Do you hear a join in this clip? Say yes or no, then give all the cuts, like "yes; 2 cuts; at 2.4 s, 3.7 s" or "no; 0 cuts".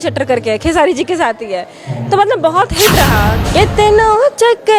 yes; 1 cut; at 3.4 s